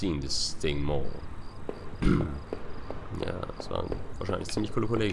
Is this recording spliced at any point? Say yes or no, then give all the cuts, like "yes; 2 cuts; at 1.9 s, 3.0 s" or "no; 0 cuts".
yes; 1 cut; at 3.5 s